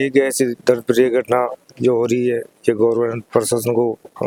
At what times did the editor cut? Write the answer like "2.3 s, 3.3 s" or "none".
none